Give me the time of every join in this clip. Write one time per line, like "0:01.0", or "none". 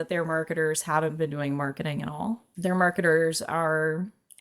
0:02.5